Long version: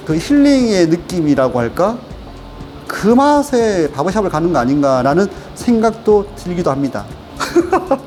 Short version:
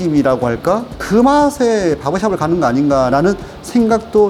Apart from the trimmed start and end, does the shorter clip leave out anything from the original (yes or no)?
yes